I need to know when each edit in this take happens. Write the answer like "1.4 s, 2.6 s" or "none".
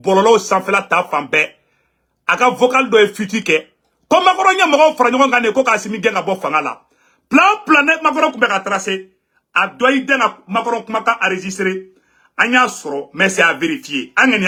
none

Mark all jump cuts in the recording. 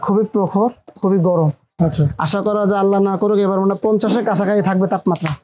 none

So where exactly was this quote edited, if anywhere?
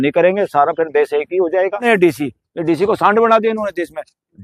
1.8 s

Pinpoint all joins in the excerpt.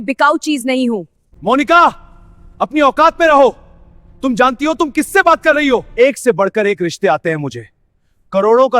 1.3 s, 5.9 s

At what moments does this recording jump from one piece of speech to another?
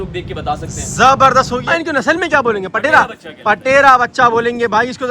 1.6 s

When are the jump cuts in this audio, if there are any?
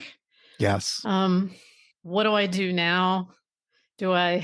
none

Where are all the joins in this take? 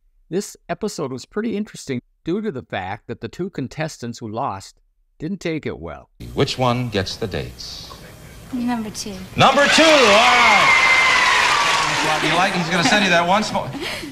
12.1 s

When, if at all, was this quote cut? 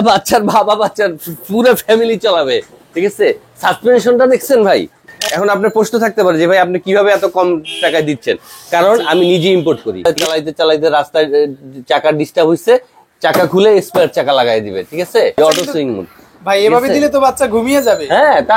5.1 s, 10.0 s, 15.4 s

